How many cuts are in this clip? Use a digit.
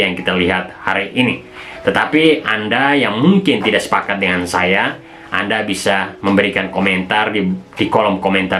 0